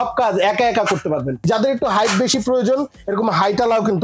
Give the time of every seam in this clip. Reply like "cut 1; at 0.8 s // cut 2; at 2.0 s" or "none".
cut 1; at 1.4 s